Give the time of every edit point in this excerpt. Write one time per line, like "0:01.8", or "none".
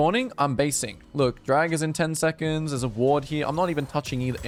none